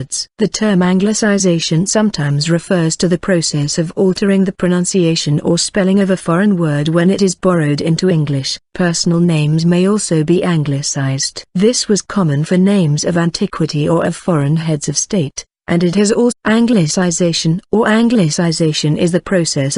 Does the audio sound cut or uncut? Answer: uncut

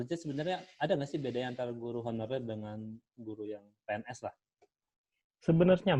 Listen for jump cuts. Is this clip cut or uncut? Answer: uncut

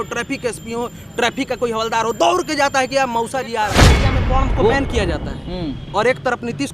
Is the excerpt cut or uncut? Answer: cut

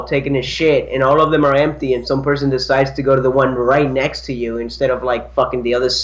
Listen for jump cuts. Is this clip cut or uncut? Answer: uncut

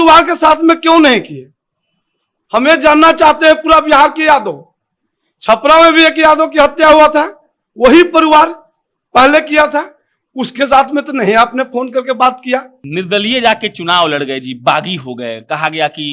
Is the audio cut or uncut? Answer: cut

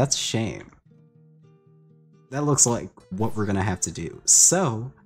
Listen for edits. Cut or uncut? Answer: cut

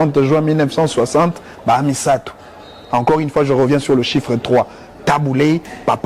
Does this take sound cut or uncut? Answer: uncut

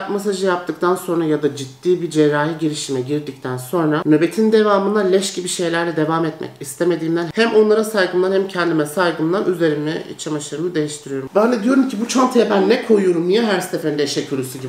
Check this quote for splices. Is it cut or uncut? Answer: uncut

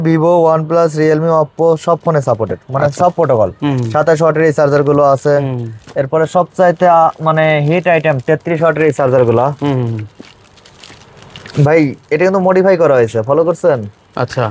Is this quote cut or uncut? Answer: uncut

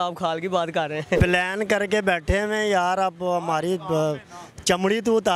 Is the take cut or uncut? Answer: cut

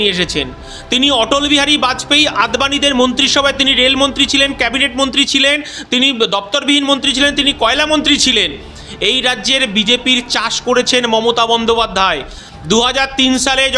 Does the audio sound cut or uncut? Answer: uncut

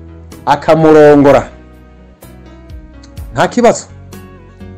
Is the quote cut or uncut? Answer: uncut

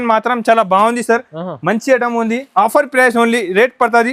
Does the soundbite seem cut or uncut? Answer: uncut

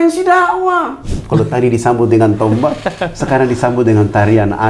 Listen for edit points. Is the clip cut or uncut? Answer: cut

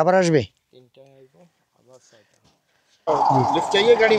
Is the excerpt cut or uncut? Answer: cut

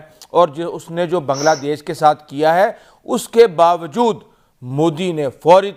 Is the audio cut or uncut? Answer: uncut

